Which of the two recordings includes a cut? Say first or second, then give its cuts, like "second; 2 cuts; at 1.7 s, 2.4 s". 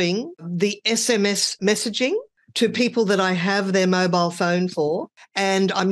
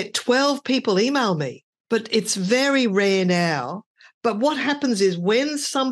first; 1 cut; at 1.5 s